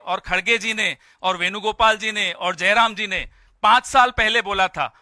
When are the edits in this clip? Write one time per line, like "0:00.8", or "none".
none